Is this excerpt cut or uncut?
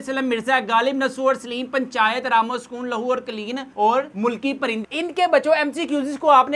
uncut